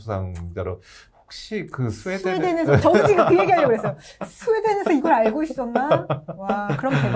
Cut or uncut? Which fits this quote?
uncut